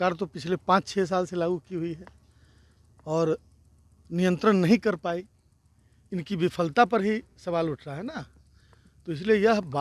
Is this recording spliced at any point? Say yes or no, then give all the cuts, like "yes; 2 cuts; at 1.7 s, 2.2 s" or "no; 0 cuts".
no; 0 cuts